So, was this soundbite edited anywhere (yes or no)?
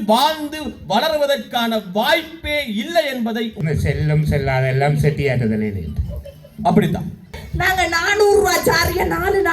yes